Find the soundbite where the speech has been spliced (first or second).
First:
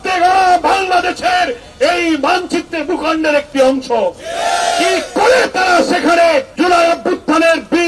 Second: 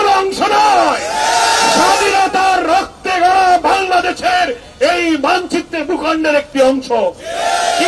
first